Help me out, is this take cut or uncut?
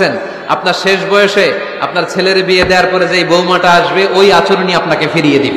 uncut